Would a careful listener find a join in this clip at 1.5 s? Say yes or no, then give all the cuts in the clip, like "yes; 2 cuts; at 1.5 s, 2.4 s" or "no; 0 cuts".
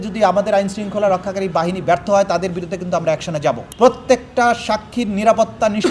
no; 1 cut; at 3.7 s